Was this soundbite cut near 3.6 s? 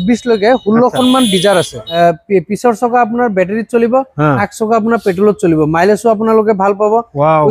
no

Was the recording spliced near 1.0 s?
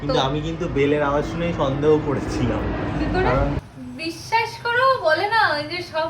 no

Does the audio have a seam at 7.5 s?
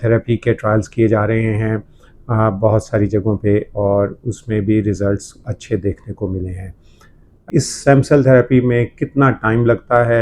yes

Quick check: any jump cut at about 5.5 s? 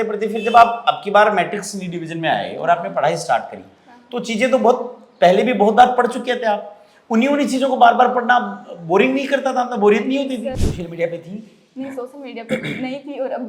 no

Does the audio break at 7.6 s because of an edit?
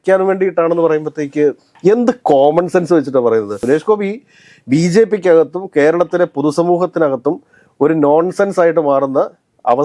no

